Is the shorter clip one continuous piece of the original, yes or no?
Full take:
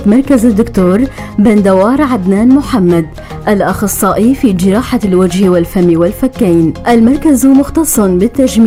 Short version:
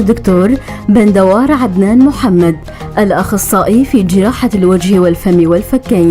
yes